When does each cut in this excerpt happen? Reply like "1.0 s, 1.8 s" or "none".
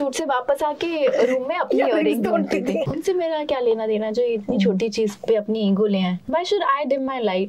2.8 s, 6.2 s